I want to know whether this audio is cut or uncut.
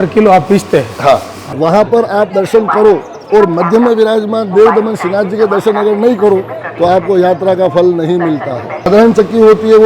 cut